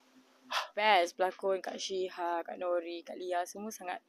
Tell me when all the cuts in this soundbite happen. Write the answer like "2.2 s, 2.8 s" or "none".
0.9 s